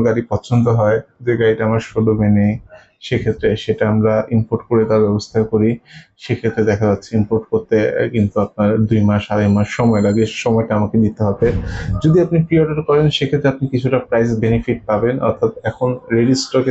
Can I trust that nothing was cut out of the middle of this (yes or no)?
yes